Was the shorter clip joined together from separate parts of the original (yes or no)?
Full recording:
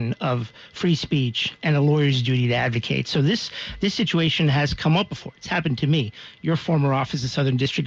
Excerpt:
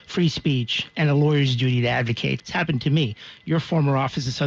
yes